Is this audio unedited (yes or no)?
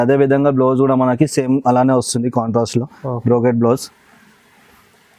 yes